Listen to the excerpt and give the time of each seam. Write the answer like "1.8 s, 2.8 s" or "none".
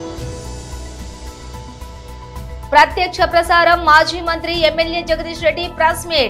none